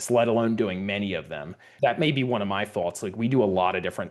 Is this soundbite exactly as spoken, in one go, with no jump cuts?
no; 1 cut; at 1.7 s

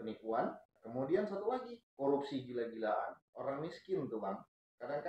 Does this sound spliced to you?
yes; 1 cut; at 3.2 s

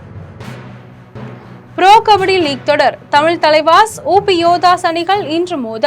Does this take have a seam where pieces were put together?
yes; 1 cut; at 1.4 s

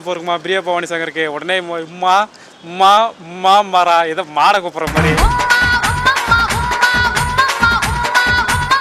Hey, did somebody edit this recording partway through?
no; 0 cuts

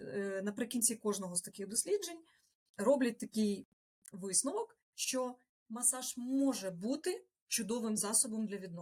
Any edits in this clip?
no; 0 cuts

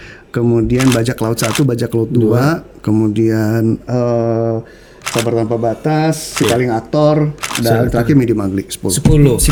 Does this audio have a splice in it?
no; 0 cuts

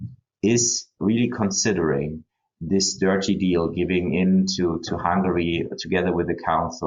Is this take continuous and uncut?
no; 1 cut; at 1.0 s

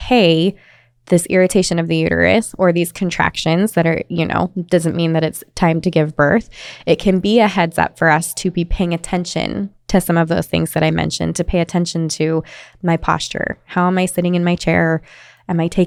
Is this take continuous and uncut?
yes; 0 cuts

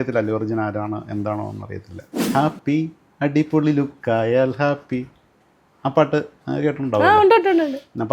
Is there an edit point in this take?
yes; 1 cut; at 2.3 s

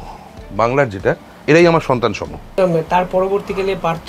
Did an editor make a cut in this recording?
yes; 2 cuts; at 1.3 s, 2.4 s

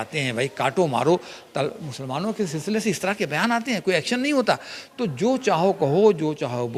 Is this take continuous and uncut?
yes; 0 cuts

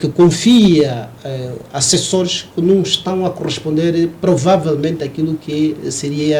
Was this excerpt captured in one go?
yes; 0 cuts

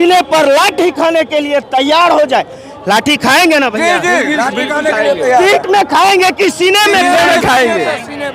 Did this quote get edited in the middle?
no; 0 cuts

